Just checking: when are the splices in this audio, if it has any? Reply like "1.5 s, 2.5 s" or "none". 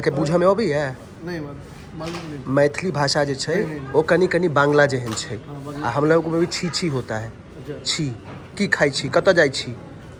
none